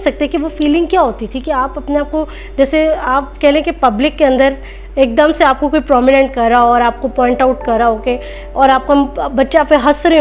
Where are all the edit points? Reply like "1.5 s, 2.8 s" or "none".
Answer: none